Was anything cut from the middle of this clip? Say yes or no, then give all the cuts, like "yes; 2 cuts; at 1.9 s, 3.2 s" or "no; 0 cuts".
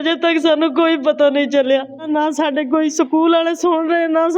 yes; 1 cut; at 2.0 s